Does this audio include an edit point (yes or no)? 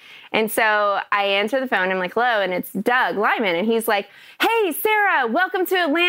no